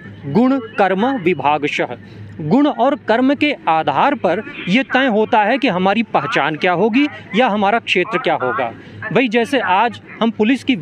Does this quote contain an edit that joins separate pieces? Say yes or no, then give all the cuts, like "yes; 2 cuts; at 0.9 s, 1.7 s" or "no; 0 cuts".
no; 0 cuts